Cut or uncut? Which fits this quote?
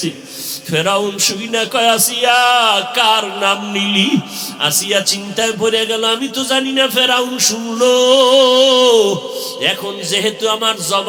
uncut